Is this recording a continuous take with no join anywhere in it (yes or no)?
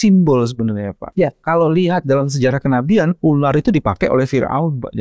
no